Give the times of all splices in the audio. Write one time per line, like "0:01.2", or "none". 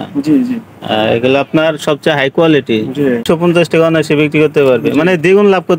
0:03.2